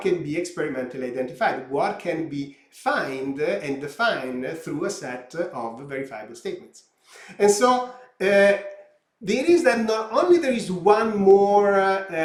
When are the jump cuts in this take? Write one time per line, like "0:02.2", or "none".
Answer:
none